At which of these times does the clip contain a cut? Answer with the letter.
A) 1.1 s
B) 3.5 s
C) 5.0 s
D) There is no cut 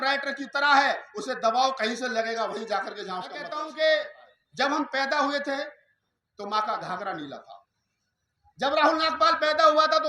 B